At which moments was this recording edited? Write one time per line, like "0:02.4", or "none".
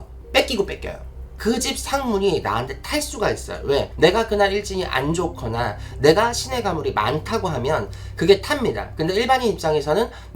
0:01.2